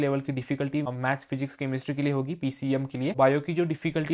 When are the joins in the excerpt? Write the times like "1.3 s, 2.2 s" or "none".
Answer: 0.9 s, 3.1 s